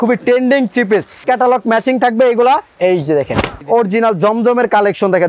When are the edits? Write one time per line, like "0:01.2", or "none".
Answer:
0:01.2
0:03.5